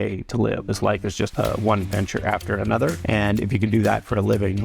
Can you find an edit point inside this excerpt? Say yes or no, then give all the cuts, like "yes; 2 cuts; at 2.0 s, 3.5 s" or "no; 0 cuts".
yes; 2 cuts; at 1.3 s, 3.0 s